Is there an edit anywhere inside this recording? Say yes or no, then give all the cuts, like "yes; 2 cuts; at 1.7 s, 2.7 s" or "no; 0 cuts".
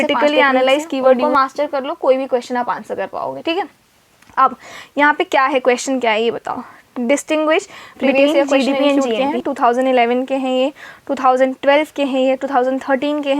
yes; 2 cuts; at 1.2 s, 9.2 s